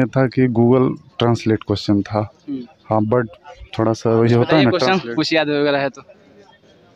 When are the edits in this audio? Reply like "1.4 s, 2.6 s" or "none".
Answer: none